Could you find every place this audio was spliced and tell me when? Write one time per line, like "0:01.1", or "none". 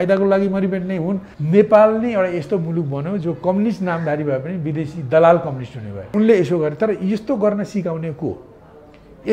0:01.3
0:06.1